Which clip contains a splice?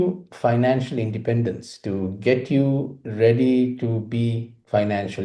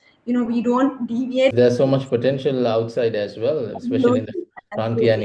second; 1 cut; at 1.5 s

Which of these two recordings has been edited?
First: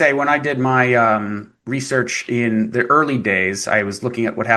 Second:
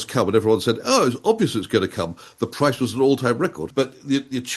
second; 1 cut; at 3.6 s

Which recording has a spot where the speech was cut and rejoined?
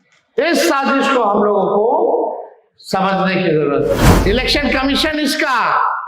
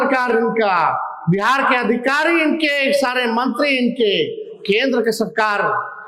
first; 1 cut; at 4.1 s

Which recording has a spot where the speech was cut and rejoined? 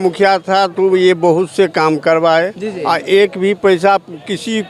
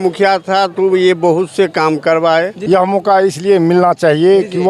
second; 1 cut; at 2.6 s

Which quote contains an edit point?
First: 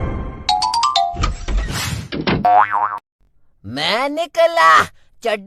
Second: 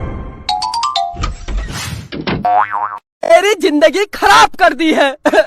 second; 1 cut; at 3.0 s

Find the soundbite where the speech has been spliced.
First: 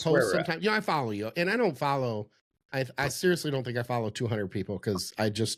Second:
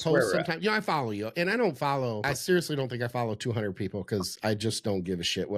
second; 1 cut; at 2.2 s

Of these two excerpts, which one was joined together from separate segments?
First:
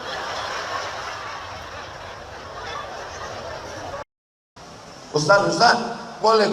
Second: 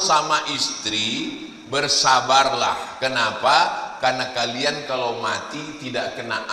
first; 1 cut; at 4.1 s

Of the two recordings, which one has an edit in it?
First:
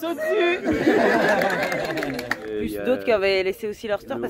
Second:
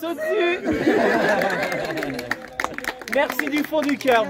first; 1 cut; at 2.5 s

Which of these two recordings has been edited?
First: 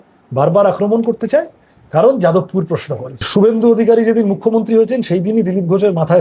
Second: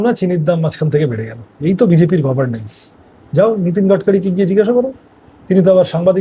first; 1 cut; at 3.3 s

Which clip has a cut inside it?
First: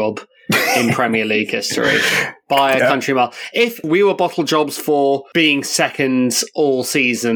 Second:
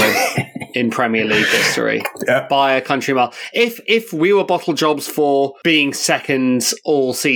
first; 1 cut; at 3.8 s

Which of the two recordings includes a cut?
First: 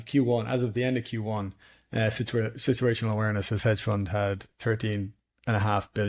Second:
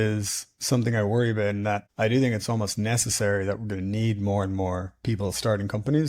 second; 1 cut; at 1.9 s

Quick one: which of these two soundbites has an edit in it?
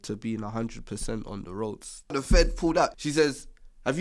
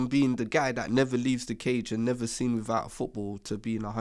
first; 2 cuts; at 2.1 s, 2.9 s

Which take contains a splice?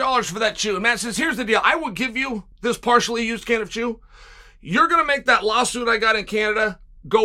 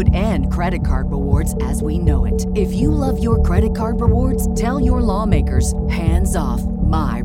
first; 1 cut; at 2.5 s

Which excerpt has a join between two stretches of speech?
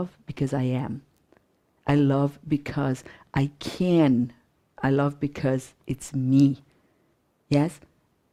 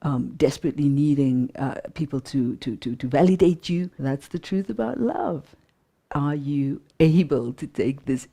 second; 1 cut; at 3.9 s

